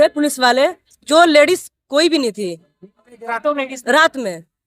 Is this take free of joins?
yes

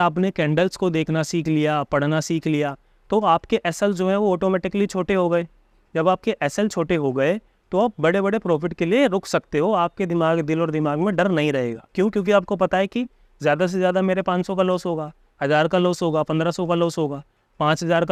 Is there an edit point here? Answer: no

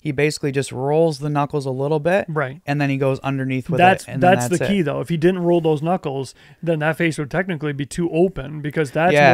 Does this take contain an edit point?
no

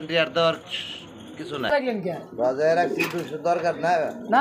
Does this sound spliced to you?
yes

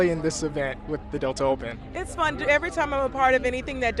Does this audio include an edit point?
no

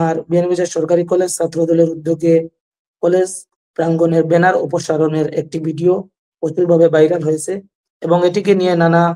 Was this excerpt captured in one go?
yes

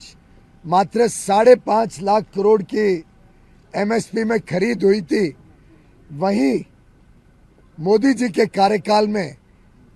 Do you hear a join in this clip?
no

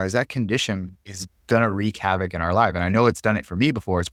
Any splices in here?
no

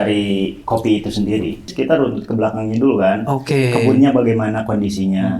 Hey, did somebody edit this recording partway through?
yes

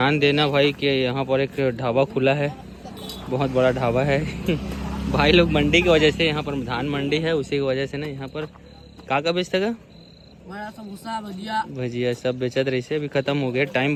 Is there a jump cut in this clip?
no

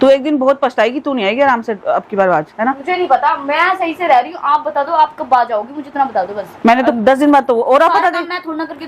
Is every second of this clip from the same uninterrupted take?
no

